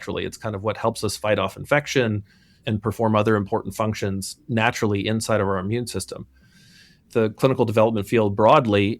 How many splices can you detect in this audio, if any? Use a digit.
2